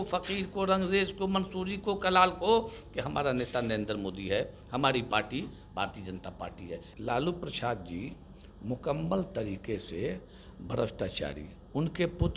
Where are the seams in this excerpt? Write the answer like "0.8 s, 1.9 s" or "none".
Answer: 6.9 s